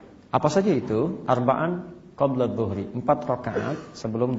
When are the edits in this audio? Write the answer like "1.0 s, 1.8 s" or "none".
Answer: none

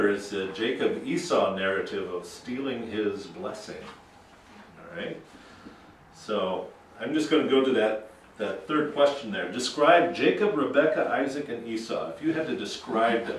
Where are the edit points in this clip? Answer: 10.9 s

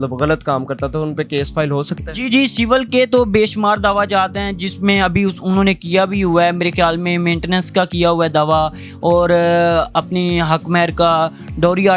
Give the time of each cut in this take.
none

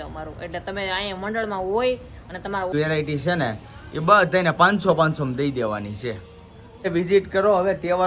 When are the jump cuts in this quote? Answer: 2.7 s, 6.9 s

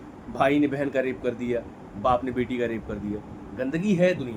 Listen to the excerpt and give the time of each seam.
none

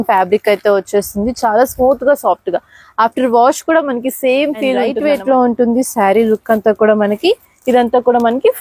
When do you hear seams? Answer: 4.9 s

